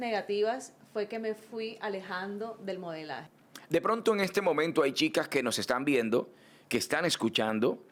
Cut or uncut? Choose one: uncut